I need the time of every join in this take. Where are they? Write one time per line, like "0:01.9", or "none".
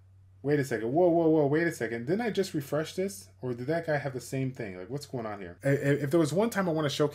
0:05.4